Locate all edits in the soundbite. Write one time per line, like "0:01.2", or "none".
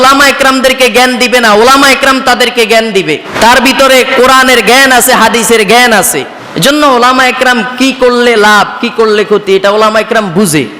0:03.3
0:06.4